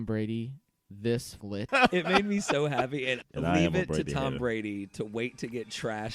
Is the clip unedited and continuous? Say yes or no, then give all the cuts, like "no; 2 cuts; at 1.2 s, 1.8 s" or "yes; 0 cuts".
no; 2 cuts; at 1.7 s, 3.3 s